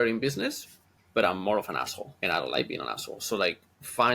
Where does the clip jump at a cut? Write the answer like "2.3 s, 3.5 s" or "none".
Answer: 2.0 s

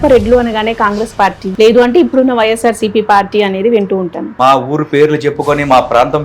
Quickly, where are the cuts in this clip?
1.4 s, 4.2 s

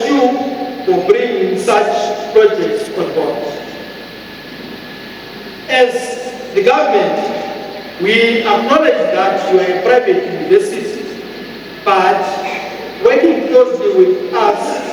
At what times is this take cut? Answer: none

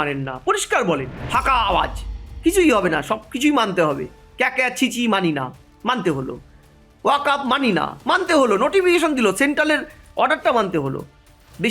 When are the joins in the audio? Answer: 1.3 s

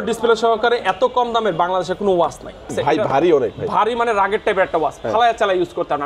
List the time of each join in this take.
2.7 s

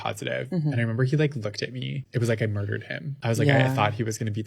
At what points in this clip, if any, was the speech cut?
2.0 s, 3.2 s

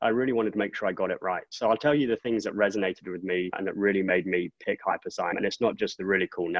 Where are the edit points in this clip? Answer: 1.5 s, 3.6 s, 5.3 s

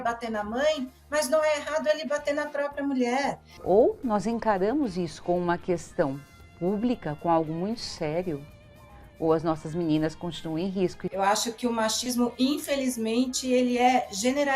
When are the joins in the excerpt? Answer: 3.6 s, 11.0 s

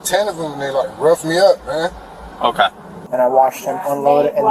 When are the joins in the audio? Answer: 3.0 s

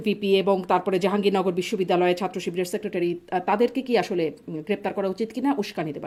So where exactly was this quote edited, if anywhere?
none

